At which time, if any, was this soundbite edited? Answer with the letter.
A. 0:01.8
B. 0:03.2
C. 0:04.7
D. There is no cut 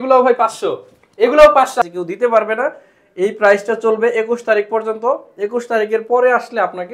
A